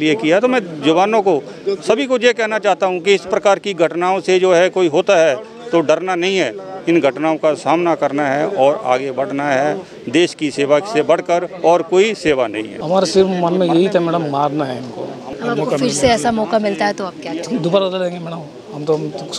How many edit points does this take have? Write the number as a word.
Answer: two